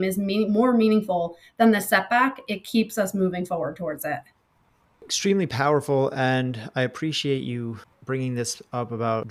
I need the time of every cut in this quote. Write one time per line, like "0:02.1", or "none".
none

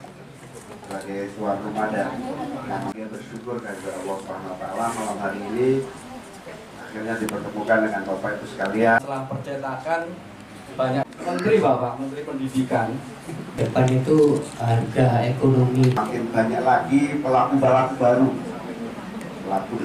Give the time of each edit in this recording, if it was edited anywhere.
0:11.1
0:13.6
0:16.0

